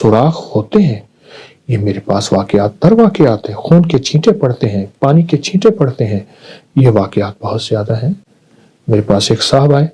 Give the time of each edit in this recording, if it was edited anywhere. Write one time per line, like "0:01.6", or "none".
none